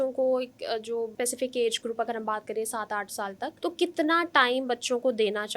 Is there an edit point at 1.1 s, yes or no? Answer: yes